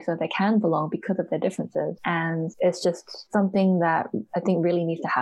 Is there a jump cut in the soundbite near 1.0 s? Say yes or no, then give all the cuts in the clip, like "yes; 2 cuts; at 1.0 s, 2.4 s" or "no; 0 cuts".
no; 2 cuts; at 2.2 s, 3.1 s